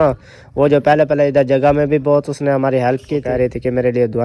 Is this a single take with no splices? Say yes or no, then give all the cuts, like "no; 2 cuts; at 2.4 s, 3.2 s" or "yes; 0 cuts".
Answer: no; 1 cut; at 3.2 s